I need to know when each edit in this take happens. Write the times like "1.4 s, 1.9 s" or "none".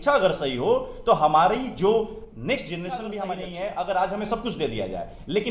3.4 s